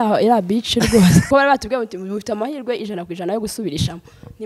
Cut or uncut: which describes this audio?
cut